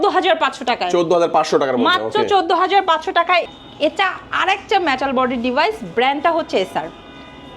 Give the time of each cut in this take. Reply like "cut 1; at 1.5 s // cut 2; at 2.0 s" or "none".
cut 1; at 3.5 s